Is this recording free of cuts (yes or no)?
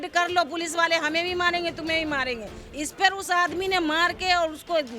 yes